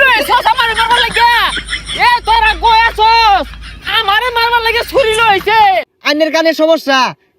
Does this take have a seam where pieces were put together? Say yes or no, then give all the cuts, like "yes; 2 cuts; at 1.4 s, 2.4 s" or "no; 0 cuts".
yes; 1 cut; at 5.9 s